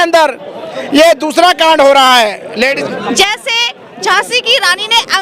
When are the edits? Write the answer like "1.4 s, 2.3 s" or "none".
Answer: 2.8 s

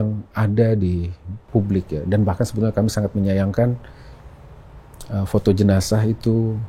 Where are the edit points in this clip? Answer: none

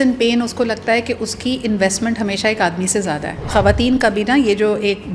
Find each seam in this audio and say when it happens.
3.4 s

